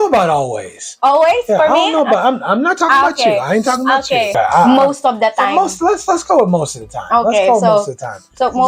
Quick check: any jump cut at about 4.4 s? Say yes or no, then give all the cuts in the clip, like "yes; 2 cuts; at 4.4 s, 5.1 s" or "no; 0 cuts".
yes; 1 cut; at 4.4 s